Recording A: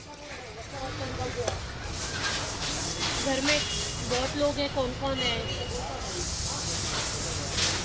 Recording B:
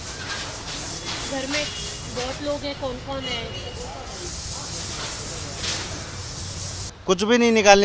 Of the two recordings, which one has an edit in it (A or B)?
B